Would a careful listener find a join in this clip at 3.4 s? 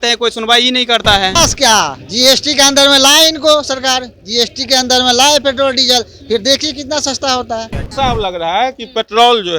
no; 2 cuts; at 1.3 s, 7.9 s

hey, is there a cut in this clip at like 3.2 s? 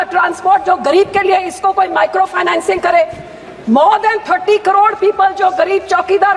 no; 0 cuts

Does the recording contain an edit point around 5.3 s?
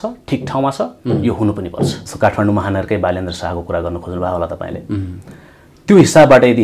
no; 1 cut; at 2.0 s

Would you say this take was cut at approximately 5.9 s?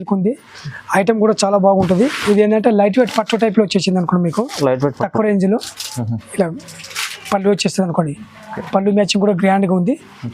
no; 1 cut; at 2.2 s

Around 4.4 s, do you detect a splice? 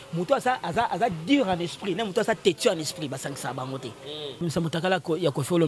yes; 1 cut; at 4.4 s

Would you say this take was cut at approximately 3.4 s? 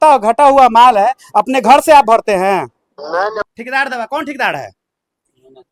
yes; 1 cut; at 3.4 s

